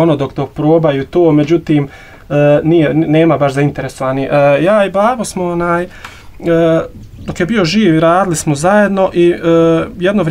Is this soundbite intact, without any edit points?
yes; 0 cuts

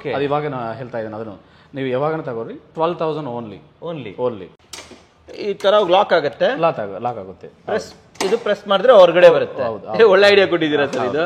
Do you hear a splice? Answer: yes; 1 cut; at 4.5 s

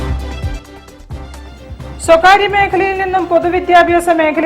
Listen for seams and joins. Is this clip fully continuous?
yes; 0 cuts

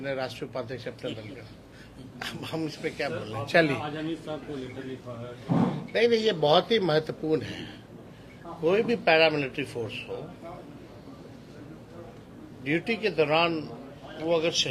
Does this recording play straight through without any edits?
yes; 0 cuts

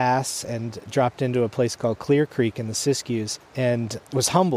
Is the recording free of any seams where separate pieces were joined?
no; 1 cut; at 3.4 s

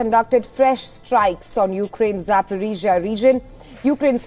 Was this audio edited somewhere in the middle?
no; 0 cuts

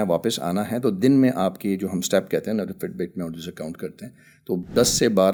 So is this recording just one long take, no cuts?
yes; 0 cuts

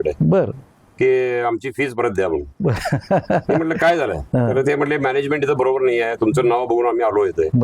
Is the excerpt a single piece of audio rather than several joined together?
yes; 0 cuts

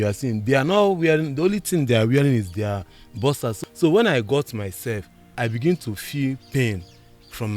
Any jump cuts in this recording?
yes; 2 cuts; at 3.6 s, 5.3 s

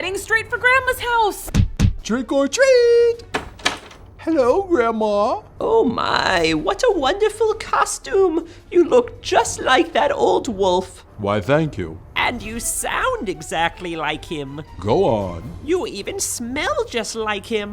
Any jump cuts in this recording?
yes; 1 cut; at 1.4 s

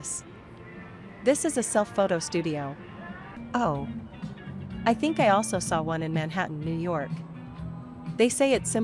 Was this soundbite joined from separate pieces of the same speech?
yes; 2 cuts; at 1.1 s, 2.8 s

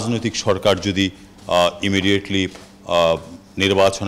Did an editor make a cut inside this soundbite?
no; 0 cuts

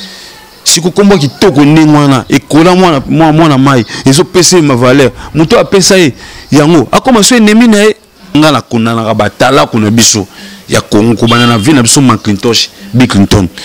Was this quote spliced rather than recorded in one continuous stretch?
yes; 1 cut; at 8.3 s

